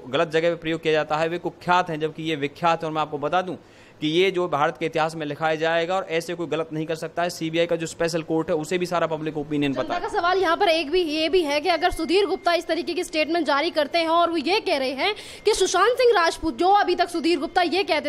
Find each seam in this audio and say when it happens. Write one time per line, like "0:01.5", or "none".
none